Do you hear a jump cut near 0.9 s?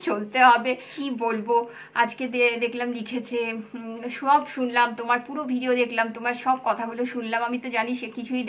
yes; 1 cut; at 0.9 s

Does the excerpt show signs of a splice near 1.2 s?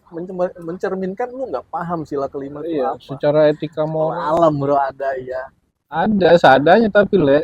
no; 1 cut; at 4.2 s

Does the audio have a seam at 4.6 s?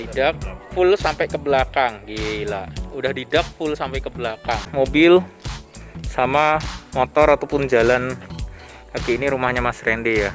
yes; 1 cut; at 4.6 s

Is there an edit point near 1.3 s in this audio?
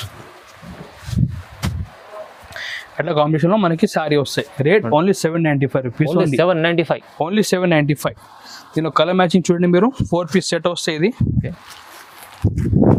no; 0 cuts

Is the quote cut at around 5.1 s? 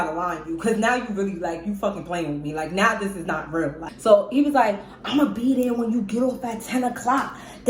no; 1 cut; at 3.9 s

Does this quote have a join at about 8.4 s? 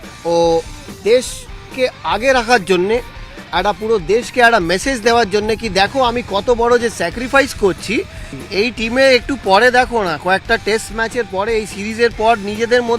yes; 1 cut; at 8.4 s

